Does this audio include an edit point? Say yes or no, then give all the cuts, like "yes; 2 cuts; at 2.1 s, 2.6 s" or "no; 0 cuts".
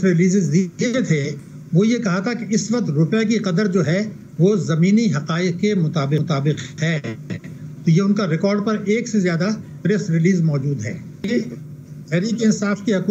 yes; 1 cut; at 11.2 s